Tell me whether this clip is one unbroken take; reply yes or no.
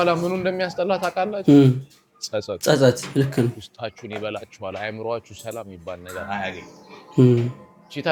yes